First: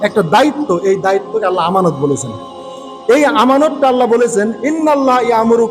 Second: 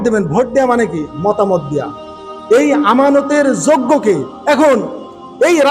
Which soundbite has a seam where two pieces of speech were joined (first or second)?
second